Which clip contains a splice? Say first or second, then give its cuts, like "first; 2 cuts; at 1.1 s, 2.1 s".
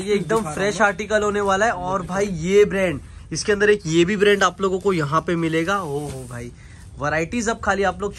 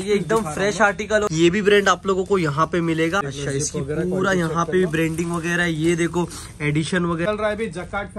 second; 3 cuts; at 1.3 s, 3.2 s, 7.3 s